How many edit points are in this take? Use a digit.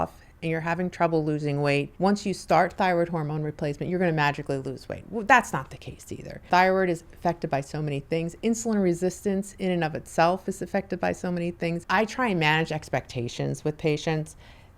3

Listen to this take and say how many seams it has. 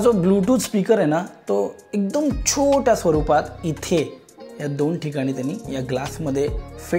0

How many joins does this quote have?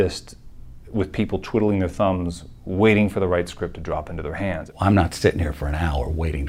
1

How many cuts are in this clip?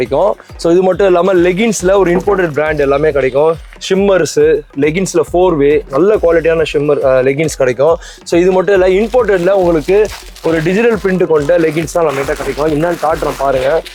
0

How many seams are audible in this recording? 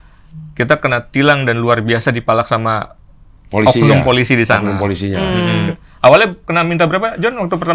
1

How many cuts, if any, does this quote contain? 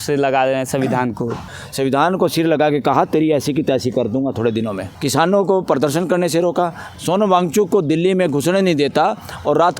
3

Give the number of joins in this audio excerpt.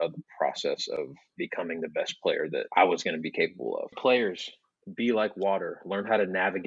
1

